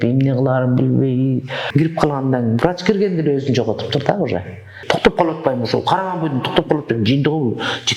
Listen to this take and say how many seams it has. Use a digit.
2